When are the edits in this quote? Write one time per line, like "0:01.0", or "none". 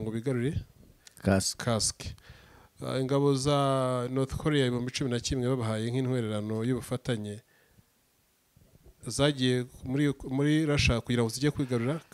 none